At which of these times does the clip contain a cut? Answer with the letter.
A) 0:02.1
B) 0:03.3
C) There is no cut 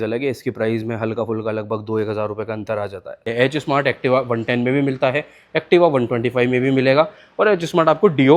B